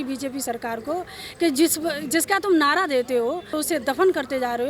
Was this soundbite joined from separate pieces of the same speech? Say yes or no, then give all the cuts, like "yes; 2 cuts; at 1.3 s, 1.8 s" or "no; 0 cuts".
yes; 1 cut; at 3.6 s